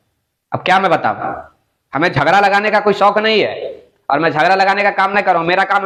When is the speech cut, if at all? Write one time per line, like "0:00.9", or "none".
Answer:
none